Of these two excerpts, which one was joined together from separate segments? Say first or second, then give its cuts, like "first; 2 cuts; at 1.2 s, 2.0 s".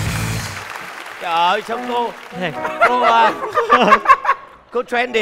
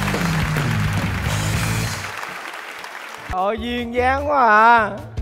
second; 1 cut; at 3.3 s